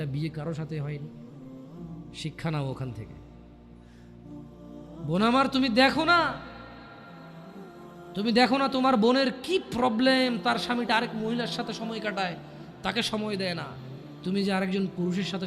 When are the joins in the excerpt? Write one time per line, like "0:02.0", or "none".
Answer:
0:01.1
0:02.2
0:03.0
0:05.1